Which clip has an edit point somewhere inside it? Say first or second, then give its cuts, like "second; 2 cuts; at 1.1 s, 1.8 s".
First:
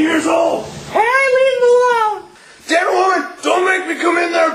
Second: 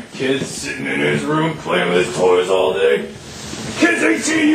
first; 1 cut; at 2.3 s